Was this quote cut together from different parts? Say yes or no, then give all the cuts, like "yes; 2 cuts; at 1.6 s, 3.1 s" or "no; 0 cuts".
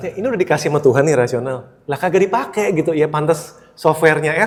no; 0 cuts